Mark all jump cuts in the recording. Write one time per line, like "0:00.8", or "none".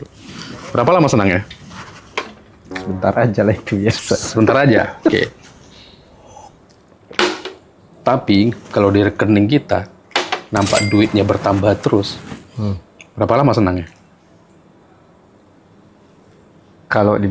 0:07.1